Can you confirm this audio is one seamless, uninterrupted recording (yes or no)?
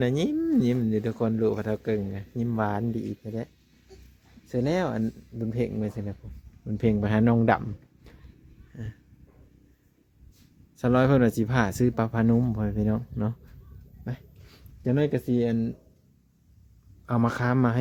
yes